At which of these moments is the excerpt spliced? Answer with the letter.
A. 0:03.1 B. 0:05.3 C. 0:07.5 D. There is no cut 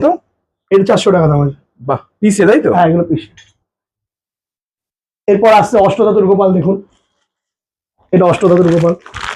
D